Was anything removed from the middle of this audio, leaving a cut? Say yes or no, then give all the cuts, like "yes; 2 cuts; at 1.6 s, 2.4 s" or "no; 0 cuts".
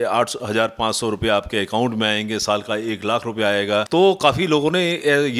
yes; 1 cut; at 3.9 s